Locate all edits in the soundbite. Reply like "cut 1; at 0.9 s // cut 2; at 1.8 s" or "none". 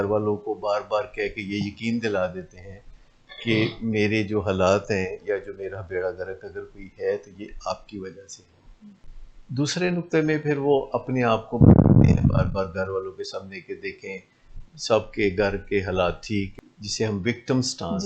cut 1; at 16.5 s